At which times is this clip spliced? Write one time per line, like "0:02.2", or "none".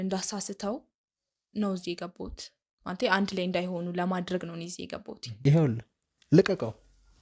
0:05.3